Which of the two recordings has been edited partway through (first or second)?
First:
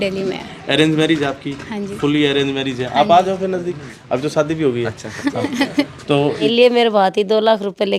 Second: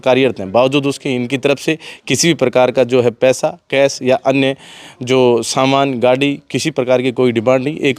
first